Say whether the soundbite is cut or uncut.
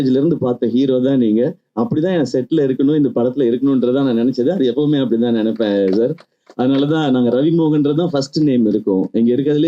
uncut